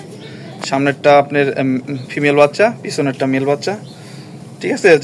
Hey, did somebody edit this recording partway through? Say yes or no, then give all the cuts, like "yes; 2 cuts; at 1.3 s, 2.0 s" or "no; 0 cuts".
no; 0 cuts